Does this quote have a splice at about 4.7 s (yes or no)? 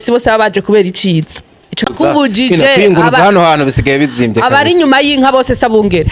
no